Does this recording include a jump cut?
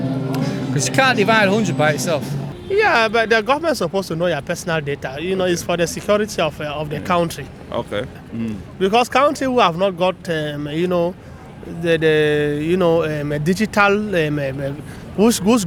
no; 0 cuts

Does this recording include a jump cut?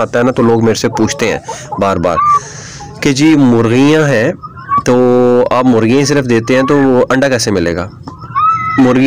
no; 0 cuts

